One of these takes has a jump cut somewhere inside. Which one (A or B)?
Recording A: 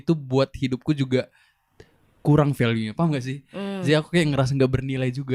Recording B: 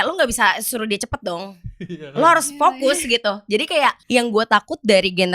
B